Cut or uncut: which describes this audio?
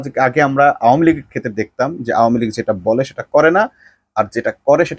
uncut